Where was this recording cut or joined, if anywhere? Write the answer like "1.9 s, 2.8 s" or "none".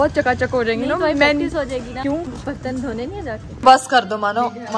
2.0 s, 3.6 s